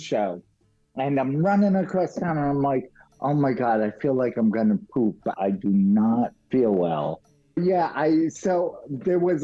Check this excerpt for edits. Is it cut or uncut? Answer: cut